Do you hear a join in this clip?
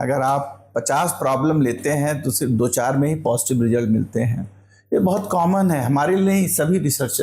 no; 0 cuts

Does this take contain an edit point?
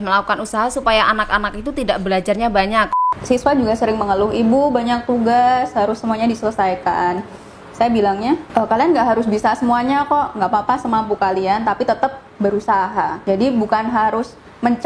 yes; 3 cuts; at 2.9 s, 8.5 s, 13.2 s

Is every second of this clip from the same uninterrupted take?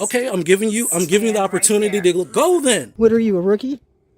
no; 1 cut; at 2.9 s

